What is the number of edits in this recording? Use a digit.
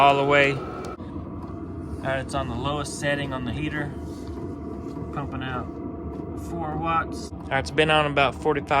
2